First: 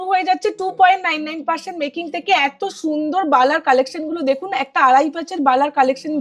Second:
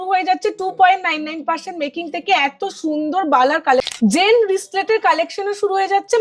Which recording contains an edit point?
second; 1 cut; at 3.9 s

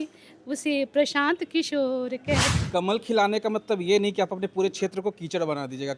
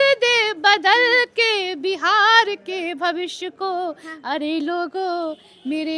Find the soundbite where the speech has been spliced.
first; 1 cut; at 2.5 s

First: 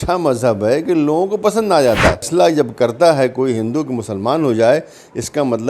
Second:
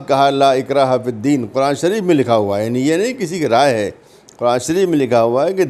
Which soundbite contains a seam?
first; 1 cut; at 2.3 s

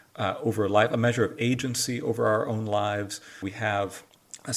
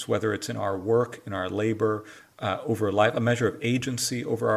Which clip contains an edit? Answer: first; 1 cut; at 3.4 s

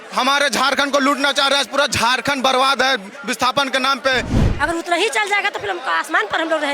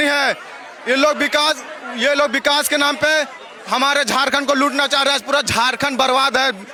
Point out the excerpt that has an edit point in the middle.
first; 1 cut; at 4.4 s

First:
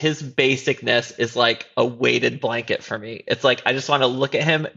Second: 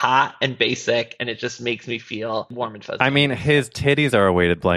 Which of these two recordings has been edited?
second; 1 cut; at 2.5 s

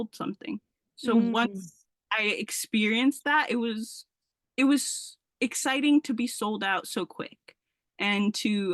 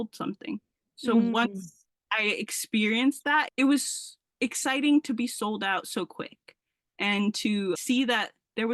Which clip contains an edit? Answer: second; 2 cuts; at 3.5 s, 7.8 s

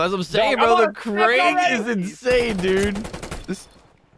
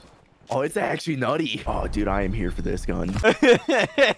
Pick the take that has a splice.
second; 2 cuts; at 1.6 s, 3.1 s

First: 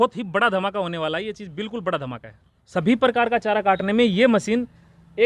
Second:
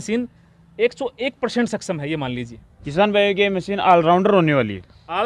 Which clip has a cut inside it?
first; 1 cut; at 2.6 s

